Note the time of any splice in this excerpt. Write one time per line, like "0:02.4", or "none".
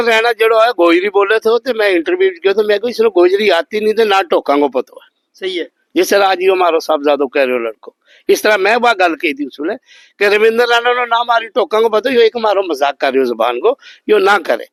none